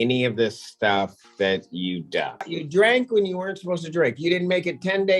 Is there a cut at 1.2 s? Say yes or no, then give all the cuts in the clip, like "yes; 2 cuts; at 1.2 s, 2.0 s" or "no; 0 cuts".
no; 1 cut; at 2.6 s